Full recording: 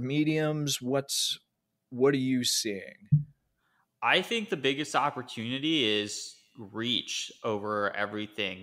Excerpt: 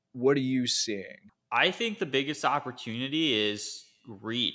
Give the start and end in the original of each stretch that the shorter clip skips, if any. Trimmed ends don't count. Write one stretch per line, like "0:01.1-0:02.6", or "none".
0:02.9-0:03.7